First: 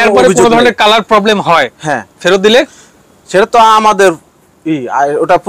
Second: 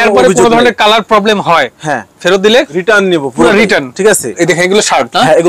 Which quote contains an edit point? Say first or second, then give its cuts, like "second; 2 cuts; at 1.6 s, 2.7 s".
second; 2 cuts; at 2.7 s, 4.4 s